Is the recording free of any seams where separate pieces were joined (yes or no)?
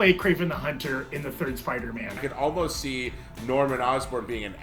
no